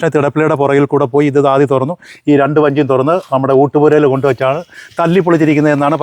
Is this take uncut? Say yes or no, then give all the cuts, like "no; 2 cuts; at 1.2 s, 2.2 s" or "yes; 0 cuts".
yes; 0 cuts